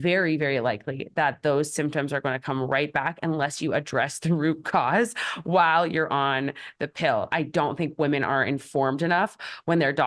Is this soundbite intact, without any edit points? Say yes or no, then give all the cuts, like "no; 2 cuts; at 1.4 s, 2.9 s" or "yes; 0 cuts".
no; 1 cut; at 7.3 s